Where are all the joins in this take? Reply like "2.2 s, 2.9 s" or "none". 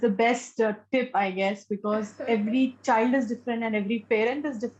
none